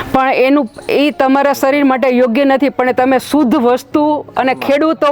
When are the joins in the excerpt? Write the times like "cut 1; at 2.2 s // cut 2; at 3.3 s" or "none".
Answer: none